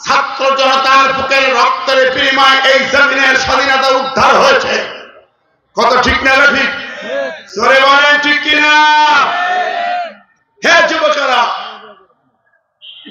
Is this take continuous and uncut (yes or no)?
yes